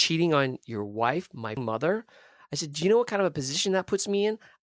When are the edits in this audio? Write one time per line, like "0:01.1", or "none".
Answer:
0:01.6

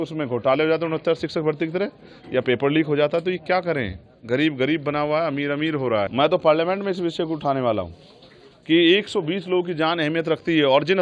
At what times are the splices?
0:06.1

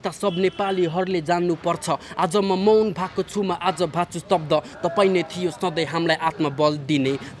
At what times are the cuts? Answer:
none

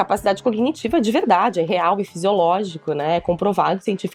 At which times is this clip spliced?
none

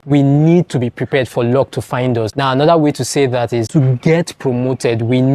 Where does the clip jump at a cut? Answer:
none

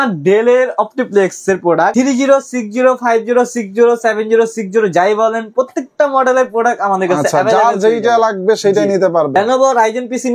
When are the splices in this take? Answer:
0:01.9
0:09.3

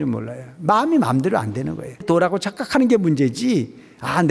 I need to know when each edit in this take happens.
0:02.1

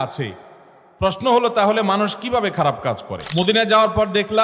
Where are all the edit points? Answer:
0:03.2

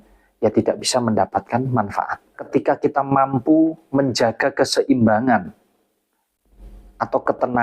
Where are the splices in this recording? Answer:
0:02.4

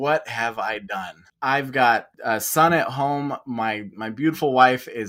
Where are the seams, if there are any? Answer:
0:01.2
0:02.1

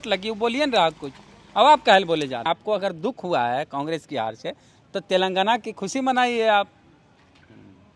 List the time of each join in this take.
0:02.4

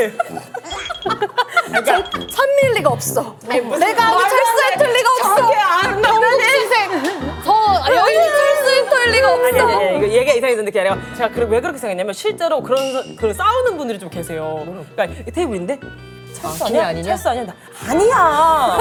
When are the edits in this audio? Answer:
none

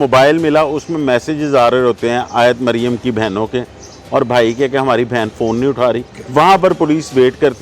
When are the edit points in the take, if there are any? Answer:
0:06.1

